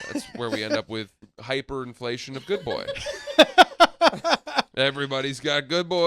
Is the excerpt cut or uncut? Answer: cut